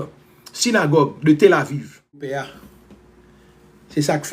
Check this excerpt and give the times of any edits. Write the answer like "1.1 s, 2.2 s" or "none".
2.5 s